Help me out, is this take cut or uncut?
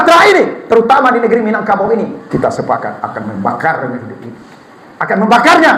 cut